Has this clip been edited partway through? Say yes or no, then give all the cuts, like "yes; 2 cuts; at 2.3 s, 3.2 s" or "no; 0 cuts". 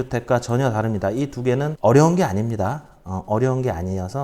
yes; 1 cut; at 1.7 s